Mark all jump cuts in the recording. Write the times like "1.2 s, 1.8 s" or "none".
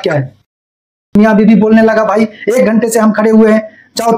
1.2 s